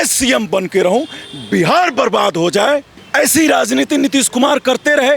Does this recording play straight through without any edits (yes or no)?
no